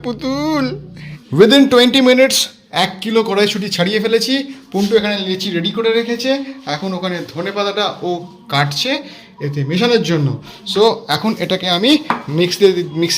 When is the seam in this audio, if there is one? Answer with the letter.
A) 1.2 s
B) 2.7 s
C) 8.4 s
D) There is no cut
A